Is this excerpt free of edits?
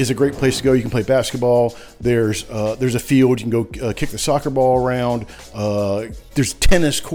yes; 0 cuts

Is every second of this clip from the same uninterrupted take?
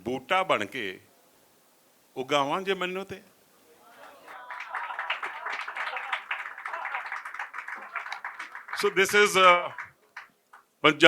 yes; 0 cuts

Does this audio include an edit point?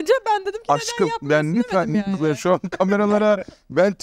no; 0 cuts

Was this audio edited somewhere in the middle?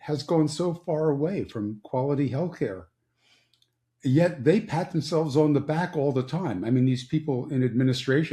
no; 0 cuts

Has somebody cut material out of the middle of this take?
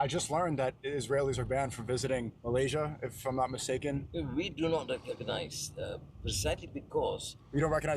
yes; 2 cuts; at 2.3 s, 4.1 s

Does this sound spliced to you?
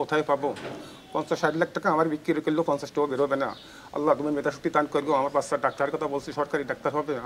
no; 0 cuts

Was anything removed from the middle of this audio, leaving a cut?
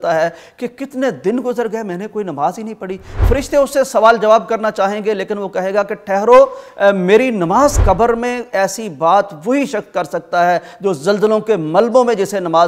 yes; 2 cuts; at 3.2 s, 7.8 s

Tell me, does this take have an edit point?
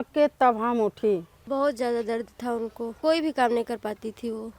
yes; 2 cuts; at 1.3 s, 2.9 s

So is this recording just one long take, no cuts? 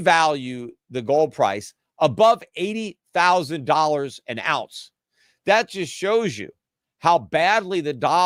yes; 0 cuts

